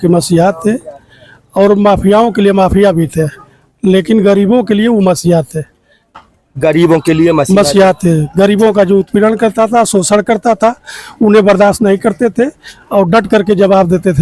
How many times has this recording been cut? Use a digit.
0